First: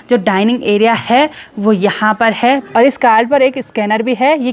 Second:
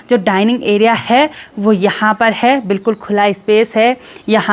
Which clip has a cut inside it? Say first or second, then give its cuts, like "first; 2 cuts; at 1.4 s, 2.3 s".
first; 1 cut; at 2.6 s